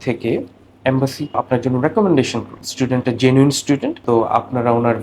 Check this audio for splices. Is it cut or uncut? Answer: cut